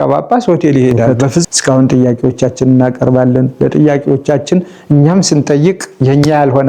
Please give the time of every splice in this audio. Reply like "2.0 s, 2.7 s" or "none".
1.5 s